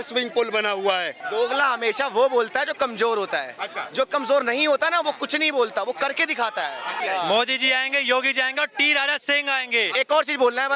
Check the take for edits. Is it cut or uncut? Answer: cut